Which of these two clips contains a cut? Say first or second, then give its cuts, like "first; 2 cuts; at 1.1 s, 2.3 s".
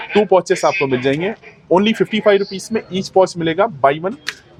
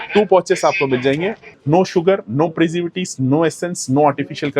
second; 1 cut; at 1.5 s